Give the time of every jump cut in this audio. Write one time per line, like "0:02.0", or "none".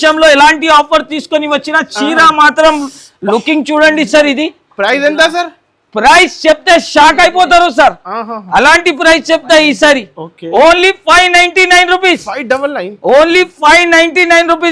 none